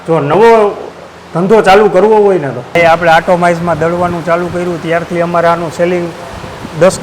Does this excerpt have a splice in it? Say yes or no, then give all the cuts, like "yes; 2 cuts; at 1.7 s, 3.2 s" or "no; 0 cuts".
yes; 1 cut; at 2.8 s